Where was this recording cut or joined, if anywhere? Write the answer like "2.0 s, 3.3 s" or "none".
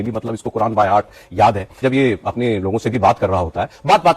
1.8 s